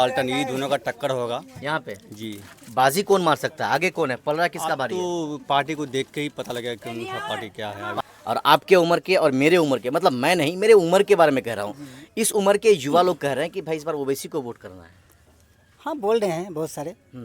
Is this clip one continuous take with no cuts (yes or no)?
no